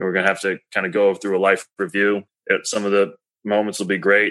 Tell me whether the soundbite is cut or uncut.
cut